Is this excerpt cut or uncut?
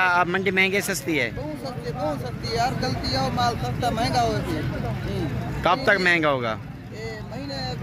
uncut